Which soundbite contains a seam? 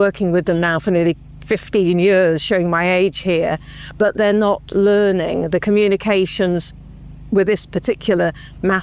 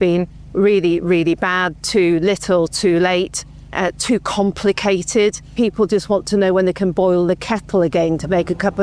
second; 1 cut; at 5.5 s

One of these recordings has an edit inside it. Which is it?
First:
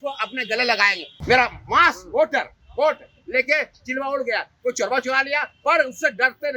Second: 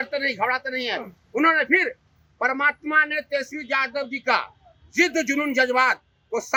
first; 1 cut; at 1.1 s

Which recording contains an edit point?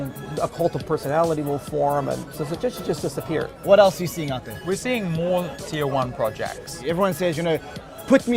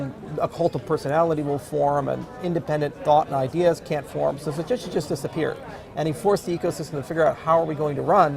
first; 4 cuts; at 2.3 s, 3.6 s, 4.5 s, 6.8 s

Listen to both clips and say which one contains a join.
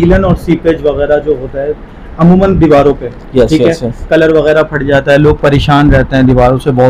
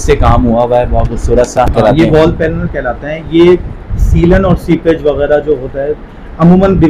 second; 1 cut; at 1.7 s

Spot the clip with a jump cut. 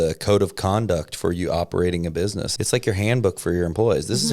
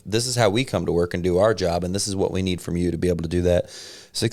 first; 1 cut; at 2.4 s

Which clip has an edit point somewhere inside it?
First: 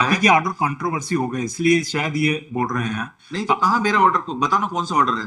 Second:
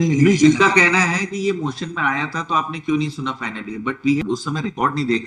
second; 1 cut; at 4.2 s

